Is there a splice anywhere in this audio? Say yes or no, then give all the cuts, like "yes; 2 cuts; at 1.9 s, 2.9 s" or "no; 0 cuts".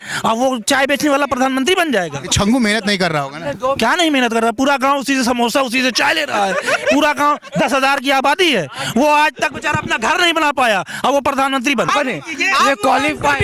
yes; 1 cut; at 11.9 s